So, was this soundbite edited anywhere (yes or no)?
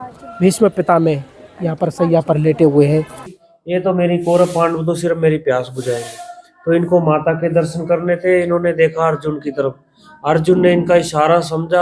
yes